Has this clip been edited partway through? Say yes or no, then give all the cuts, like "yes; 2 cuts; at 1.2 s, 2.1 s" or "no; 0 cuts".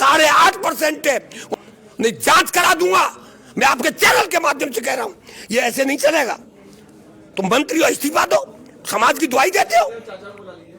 yes; 1 cut; at 1.5 s